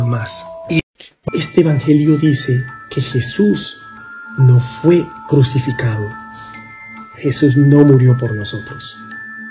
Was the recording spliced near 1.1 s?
yes; 1 cut; at 1.1 s

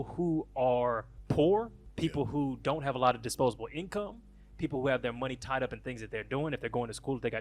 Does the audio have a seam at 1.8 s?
yes; 2 cuts; at 1.1 s, 1.8 s

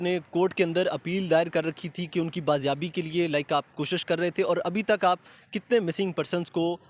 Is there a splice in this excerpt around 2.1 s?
no; 0 cuts

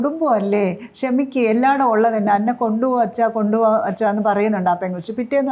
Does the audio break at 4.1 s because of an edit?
no; 0 cuts

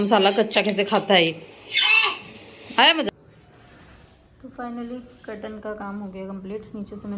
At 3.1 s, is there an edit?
yes; 1 cut; at 3.1 s

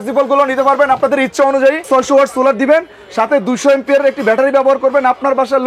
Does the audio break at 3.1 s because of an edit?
no; 1 cut; at 1.9 s

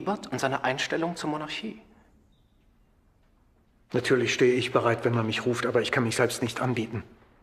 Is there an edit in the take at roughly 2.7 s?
yes; 1 cut; at 2.7 s

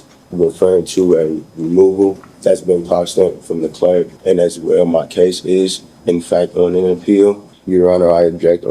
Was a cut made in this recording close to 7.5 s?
yes; 3 cuts; at 2.3 s, 4.1 s, 7.5 s

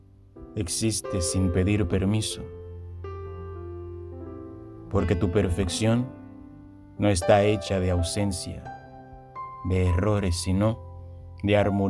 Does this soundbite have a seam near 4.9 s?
yes; 2 cuts; at 3.0 s, 4.9 s

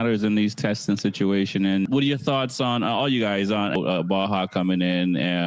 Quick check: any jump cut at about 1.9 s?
yes; 2 cuts; at 1.9 s, 3.8 s

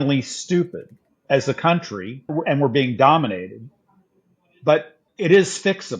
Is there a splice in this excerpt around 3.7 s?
no; 3 cuts; at 1.2 s, 2.3 s, 5.0 s

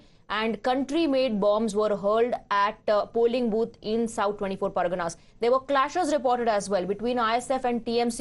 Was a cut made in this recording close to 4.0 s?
no; 1 cut; at 5.9 s

